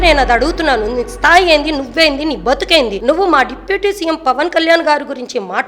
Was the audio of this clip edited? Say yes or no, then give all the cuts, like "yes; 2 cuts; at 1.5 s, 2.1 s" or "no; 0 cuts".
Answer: yes; 1 cut; at 3.0 s